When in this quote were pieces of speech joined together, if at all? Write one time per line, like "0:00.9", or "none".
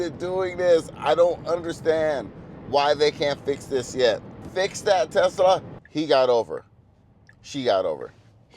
0:04.4
0:05.8